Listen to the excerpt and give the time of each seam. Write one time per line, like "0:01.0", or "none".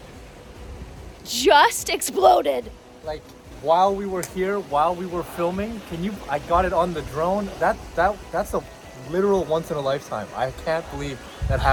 none

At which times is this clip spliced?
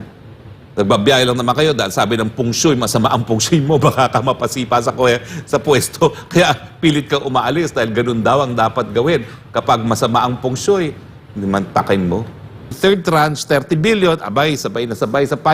0:12.7

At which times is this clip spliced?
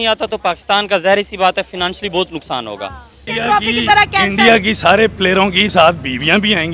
0:03.2

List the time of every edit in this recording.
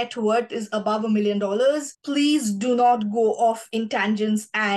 0:01.9

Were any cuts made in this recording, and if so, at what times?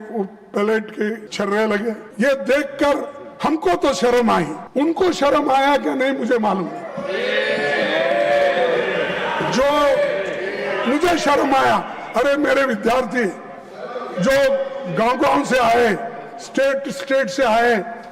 0:01.3
0:02.0
0:04.6

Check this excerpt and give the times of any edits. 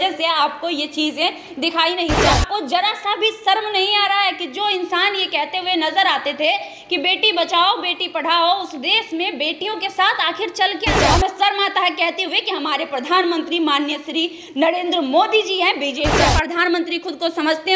0:02.3
0:10.9
0:16.2

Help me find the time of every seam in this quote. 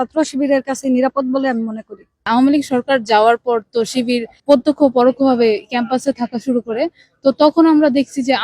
0:02.2

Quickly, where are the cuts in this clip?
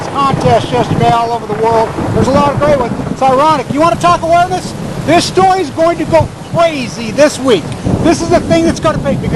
0:01.1

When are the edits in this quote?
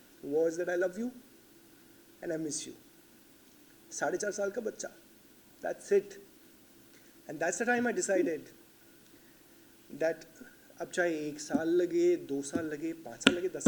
none

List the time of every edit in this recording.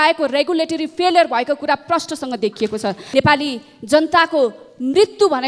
0:03.0

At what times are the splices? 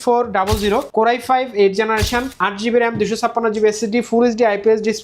0:00.9
0:02.3

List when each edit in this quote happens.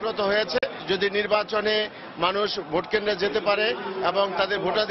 none

